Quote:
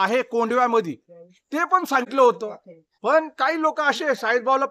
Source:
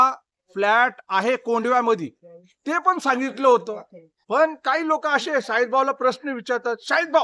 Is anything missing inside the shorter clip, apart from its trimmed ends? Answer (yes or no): yes